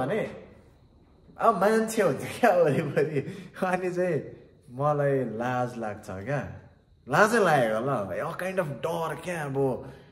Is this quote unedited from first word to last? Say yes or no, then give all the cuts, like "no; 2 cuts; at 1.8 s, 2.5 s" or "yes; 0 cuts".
yes; 0 cuts